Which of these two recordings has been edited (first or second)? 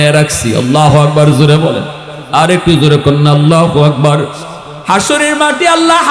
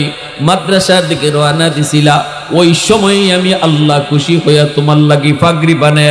first